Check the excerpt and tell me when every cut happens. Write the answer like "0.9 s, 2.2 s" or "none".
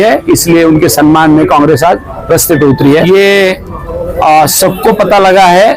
3.0 s